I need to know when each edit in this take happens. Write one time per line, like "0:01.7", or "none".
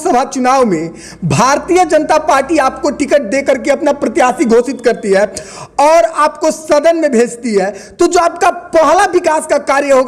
none